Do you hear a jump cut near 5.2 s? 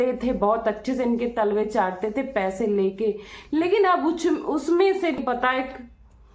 yes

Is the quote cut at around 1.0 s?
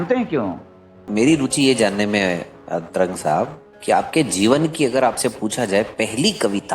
yes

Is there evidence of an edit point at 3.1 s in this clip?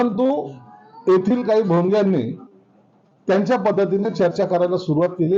no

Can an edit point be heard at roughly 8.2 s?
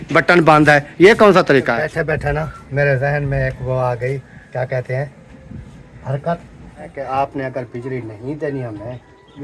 no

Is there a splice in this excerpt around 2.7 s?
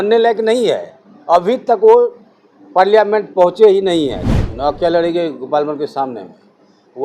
no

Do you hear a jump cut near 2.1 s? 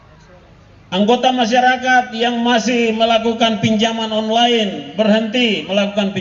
no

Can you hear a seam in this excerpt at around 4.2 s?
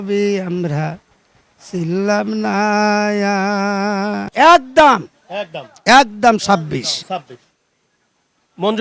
yes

